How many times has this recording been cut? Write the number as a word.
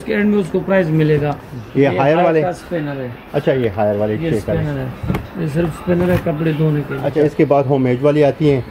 two